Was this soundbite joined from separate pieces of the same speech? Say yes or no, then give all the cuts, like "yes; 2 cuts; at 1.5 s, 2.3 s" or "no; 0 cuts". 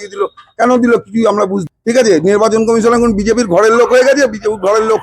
yes; 1 cut; at 1.6 s